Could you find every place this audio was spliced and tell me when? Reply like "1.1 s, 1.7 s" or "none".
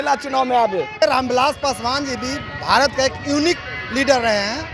1.0 s